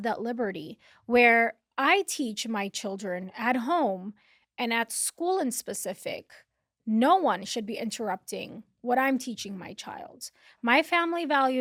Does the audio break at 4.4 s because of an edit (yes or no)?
no